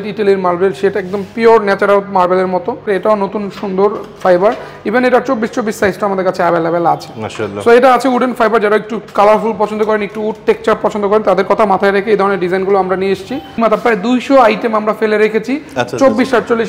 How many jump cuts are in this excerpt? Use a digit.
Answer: 2